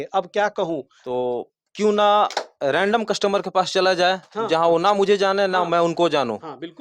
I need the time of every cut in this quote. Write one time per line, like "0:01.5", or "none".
0:00.9